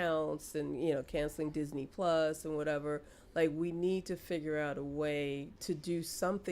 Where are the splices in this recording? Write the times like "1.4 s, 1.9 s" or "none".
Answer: 5.5 s

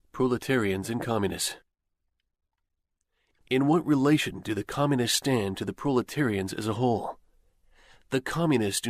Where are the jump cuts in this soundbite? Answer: 5.3 s

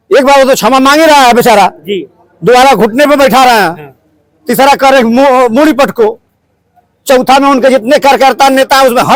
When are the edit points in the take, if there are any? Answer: none

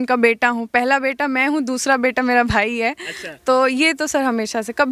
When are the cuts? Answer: none

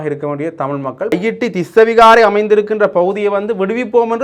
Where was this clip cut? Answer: 1.1 s

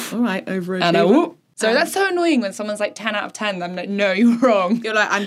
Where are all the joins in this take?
1.4 s

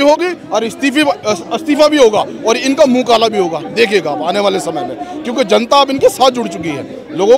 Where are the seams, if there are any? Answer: none

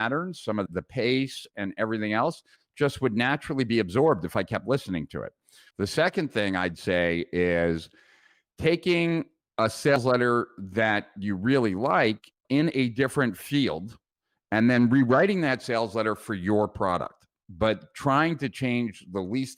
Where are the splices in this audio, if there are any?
none

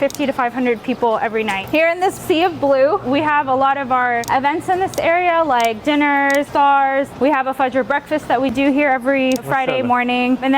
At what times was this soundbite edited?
1.6 s, 3.0 s, 4.2 s, 6.5 s, 9.5 s

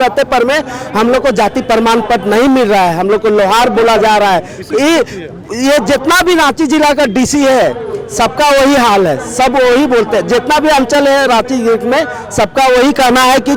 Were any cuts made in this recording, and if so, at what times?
none

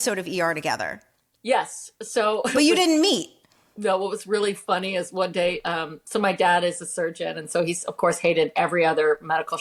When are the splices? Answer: none

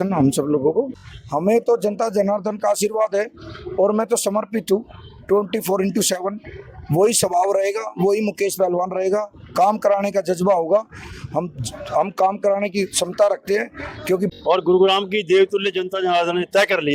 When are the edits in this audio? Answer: 1.0 s, 14.3 s

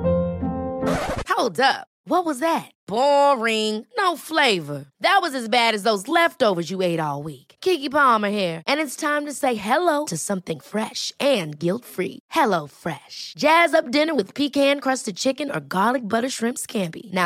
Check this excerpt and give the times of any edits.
none

